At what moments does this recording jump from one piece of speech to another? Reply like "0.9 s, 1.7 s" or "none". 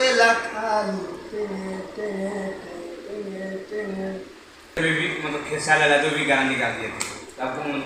4.7 s